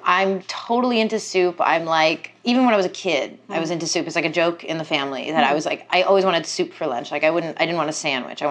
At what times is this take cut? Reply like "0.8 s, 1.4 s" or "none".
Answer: none